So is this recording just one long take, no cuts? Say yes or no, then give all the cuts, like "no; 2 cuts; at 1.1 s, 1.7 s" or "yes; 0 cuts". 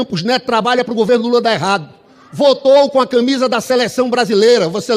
yes; 0 cuts